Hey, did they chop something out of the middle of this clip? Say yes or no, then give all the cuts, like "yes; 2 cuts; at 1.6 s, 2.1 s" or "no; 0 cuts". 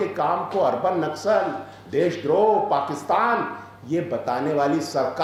no; 0 cuts